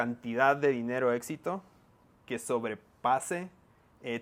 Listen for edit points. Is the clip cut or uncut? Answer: uncut